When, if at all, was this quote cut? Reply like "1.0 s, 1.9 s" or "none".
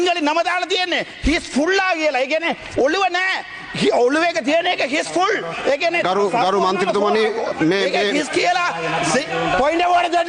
none